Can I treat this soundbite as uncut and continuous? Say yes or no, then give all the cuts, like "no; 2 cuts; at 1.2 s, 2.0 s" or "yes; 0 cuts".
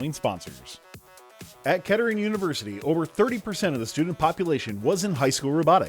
no; 1 cut; at 1.0 s